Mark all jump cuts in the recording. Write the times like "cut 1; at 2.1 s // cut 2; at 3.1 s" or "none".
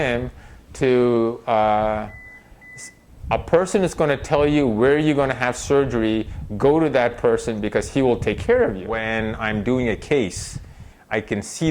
cut 1; at 8.9 s